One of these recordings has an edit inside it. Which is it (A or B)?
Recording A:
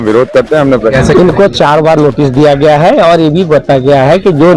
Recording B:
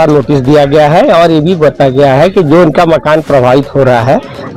A